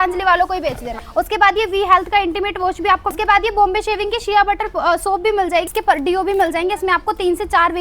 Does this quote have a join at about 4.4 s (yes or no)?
no